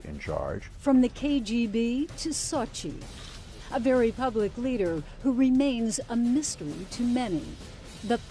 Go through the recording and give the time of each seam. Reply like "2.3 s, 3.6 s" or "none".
none